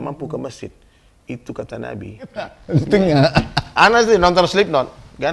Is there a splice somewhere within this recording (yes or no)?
yes